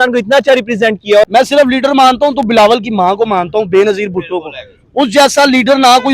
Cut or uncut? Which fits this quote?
cut